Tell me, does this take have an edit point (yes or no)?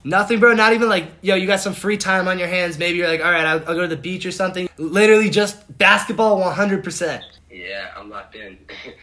yes